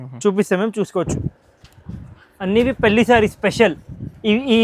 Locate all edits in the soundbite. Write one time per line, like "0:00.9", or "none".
0:01.1